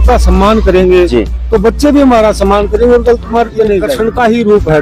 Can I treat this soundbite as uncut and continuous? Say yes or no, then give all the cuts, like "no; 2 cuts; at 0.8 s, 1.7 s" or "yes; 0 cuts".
no; 1 cut; at 3.9 s